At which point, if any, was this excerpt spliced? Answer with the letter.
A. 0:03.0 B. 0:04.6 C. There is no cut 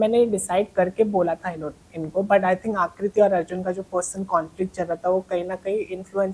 C